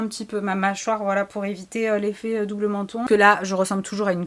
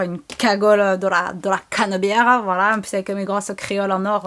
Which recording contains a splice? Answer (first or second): first